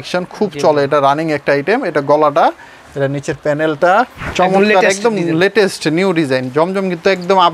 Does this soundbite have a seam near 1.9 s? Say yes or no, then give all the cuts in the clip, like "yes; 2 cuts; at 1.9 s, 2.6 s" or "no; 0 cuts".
no; 1 cut; at 4.2 s